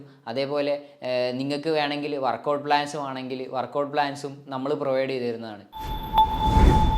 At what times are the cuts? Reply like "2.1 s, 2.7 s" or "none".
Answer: 5.7 s